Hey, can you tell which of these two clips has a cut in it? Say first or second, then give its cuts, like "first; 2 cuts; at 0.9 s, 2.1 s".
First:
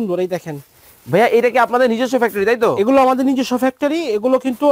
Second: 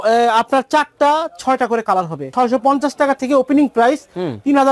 second; 1 cut; at 2.3 s